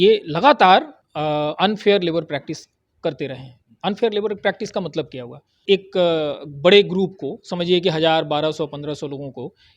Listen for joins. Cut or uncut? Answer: cut